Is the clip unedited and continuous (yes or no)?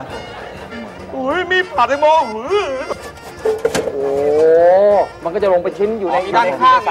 no